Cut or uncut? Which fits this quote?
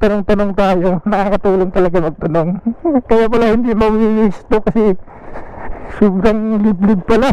uncut